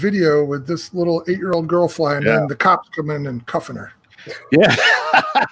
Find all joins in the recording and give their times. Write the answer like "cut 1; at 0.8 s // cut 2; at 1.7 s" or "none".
none